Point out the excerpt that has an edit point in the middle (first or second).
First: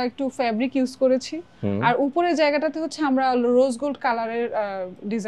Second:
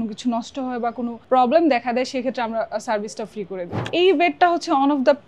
second